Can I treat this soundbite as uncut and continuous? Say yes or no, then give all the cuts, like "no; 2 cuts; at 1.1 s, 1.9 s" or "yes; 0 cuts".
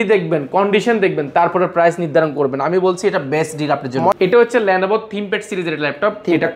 yes; 0 cuts